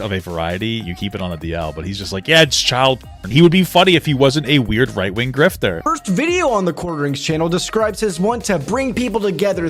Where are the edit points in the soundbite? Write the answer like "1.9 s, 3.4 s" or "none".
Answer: 0.8 s, 3.3 s, 5.8 s